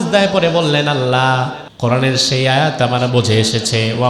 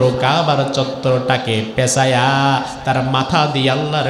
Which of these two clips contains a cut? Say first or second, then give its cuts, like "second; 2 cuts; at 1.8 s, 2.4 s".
first; 1 cut; at 1.6 s